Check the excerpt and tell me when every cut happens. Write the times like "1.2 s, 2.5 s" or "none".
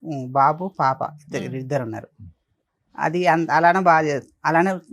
none